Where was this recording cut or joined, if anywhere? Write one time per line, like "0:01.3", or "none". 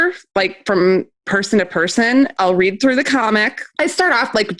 0:02.3
0:03.6

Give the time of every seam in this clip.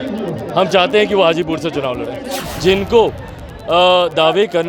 0:02.4

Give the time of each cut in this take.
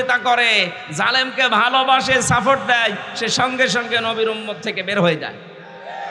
none

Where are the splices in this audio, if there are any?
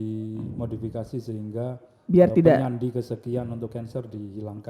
none

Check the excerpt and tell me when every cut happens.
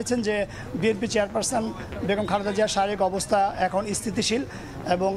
none

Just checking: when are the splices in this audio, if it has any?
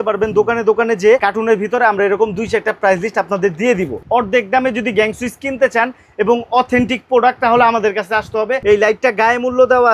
0:01.2
0:04.0
0:08.6

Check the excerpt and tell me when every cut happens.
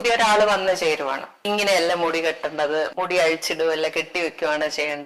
0:01.3

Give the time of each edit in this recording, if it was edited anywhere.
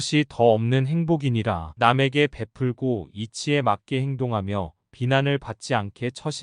none

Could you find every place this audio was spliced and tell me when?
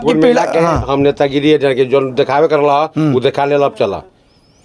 none

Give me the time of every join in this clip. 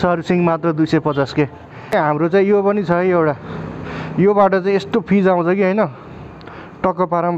0:01.9

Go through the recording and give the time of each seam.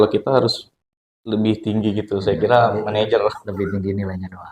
none

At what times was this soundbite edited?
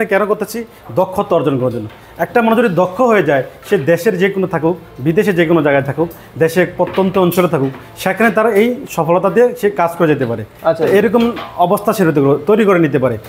none

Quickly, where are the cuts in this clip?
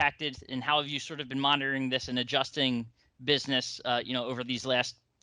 none

